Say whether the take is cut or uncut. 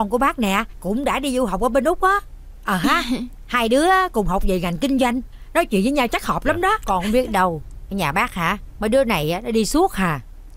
cut